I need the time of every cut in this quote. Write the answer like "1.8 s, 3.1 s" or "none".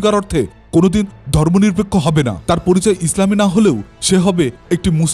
2.4 s